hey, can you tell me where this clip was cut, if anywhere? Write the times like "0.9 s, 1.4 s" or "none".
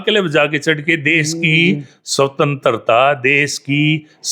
none